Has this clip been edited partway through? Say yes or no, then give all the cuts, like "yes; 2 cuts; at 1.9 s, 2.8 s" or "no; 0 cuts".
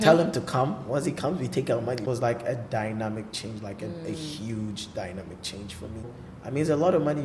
yes; 2 cuts; at 2.0 s, 6.1 s